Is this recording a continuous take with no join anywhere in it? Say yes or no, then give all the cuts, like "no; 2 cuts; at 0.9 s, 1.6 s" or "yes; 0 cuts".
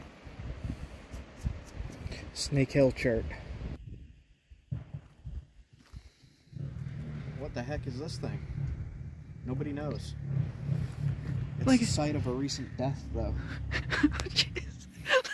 no; 1 cut; at 3.8 s